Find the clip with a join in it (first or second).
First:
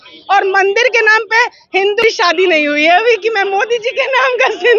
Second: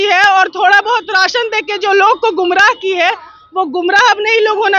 first